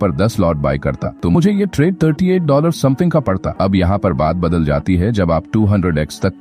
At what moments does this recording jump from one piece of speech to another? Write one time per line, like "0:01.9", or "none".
0:01.1
0:03.5